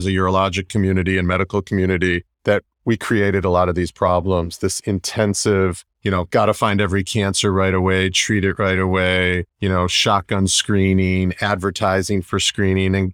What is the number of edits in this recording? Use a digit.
3